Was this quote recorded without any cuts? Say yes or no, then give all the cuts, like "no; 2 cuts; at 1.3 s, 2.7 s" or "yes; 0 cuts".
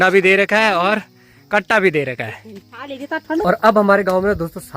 no; 1 cut; at 3.4 s